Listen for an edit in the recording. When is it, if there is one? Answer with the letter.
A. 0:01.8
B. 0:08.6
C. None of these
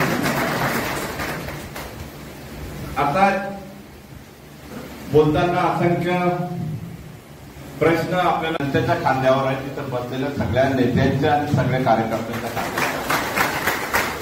B